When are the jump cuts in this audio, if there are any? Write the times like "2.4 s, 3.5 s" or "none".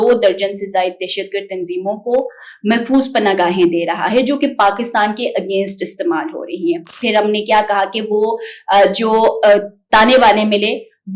7.0 s